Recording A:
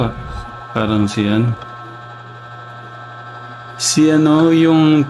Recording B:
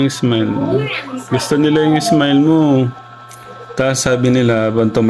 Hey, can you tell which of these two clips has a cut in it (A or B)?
B